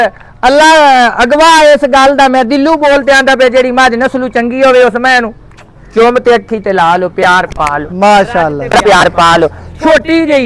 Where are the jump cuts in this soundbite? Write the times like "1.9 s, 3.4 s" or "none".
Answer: none